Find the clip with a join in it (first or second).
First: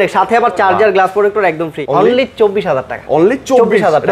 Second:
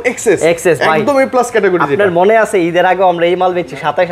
first